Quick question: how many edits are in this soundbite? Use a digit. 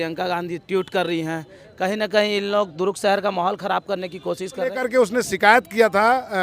1